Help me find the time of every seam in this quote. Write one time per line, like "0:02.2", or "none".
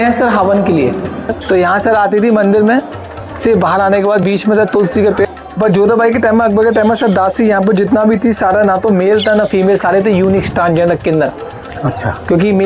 0:01.3
0:05.3